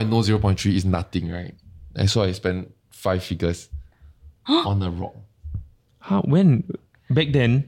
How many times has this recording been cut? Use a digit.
0